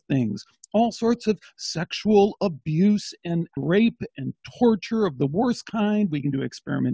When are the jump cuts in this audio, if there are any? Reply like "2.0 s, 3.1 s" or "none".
3.6 s